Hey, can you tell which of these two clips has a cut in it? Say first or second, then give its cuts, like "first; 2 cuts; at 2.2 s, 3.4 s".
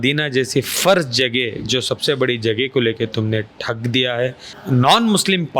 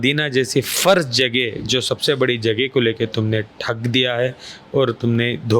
first; 1 cut; at 4.5 s